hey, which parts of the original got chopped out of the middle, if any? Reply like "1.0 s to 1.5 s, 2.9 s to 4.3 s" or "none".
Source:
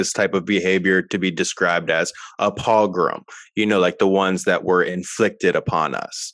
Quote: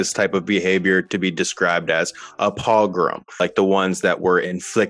3.4 s to 3.8 s